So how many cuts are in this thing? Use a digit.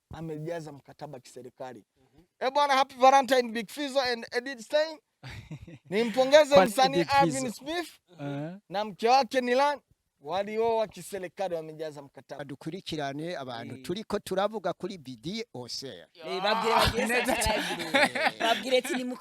1